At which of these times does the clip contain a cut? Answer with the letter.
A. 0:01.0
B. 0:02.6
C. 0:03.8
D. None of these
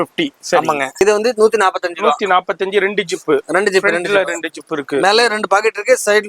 A